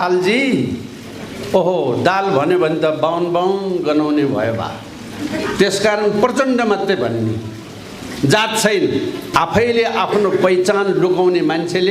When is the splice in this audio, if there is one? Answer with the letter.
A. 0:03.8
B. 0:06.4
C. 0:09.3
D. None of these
C